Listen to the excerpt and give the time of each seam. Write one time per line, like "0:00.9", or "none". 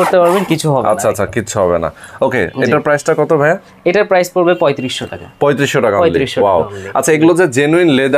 none